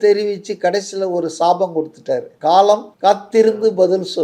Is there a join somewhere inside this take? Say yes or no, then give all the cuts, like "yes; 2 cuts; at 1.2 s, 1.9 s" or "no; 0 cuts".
yes; 2 cuts; at 2.3 s, 2.9 s